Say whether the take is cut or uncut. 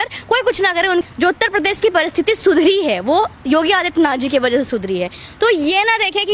cut